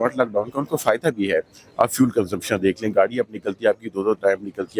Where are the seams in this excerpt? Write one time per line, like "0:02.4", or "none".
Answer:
none